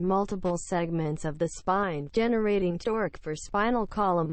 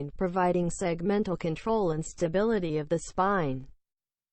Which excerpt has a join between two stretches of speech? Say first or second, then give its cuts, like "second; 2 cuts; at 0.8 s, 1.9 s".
second; 1 cut; at 3.4 s